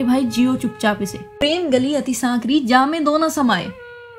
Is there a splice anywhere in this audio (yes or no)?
yes